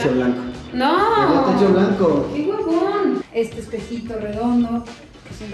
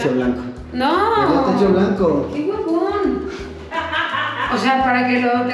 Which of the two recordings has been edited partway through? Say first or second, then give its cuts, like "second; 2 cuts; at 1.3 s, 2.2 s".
first; 1 cut; at 3.3 s